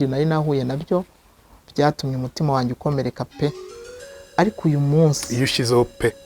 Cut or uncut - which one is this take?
cut